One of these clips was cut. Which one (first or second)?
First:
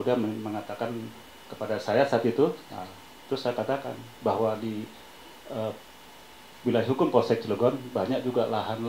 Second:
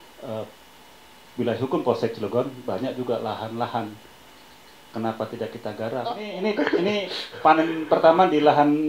second